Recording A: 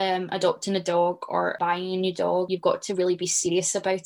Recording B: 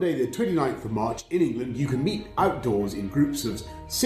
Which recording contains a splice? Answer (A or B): A